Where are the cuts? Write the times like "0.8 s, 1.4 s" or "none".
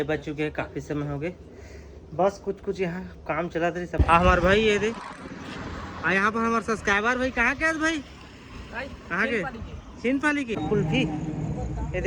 4.0 s, 10.5 s